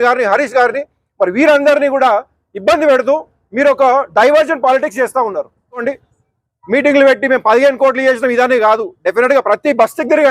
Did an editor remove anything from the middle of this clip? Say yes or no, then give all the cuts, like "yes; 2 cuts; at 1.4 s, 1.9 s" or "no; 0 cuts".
yes; 1 cut; at 5.8 s